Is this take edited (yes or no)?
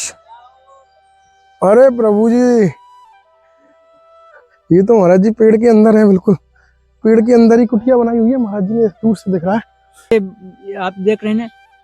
yes